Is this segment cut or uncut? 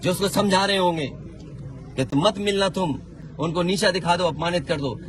uncut